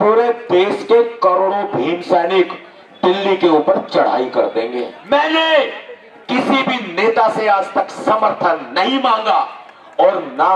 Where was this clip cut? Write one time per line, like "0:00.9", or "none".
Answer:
0:04.9